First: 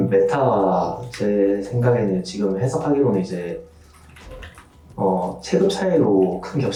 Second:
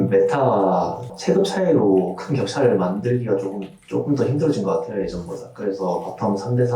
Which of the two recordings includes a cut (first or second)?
second